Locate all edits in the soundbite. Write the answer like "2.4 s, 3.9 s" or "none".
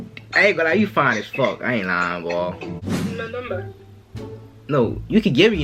2.9 s

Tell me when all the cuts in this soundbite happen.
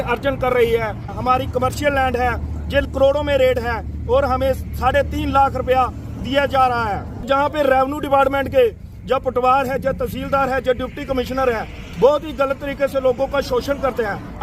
1.1 s, 2.8 s, 7.2 s

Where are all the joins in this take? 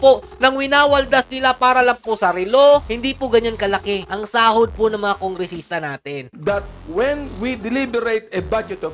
2.8 s, 6.3 s

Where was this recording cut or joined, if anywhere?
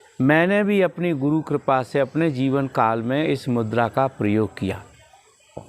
none

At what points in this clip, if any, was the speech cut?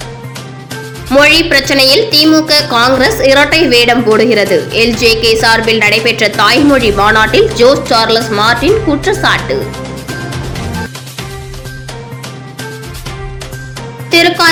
none

